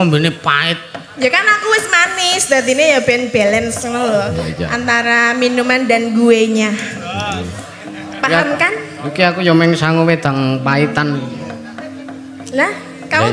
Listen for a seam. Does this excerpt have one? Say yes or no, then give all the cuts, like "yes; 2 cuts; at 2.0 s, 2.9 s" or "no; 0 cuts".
no; 0 cuts